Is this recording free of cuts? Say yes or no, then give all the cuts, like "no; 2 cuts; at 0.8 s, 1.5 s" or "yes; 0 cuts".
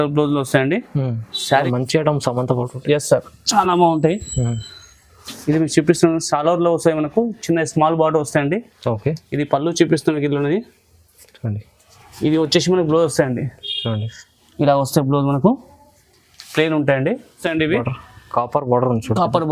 no; 2 cuts; at 1.7 s, 17.4 s